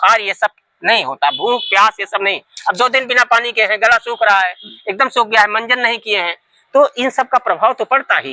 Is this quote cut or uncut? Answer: uncut